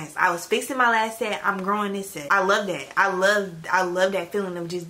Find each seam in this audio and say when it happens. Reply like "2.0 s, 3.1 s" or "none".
2.2 s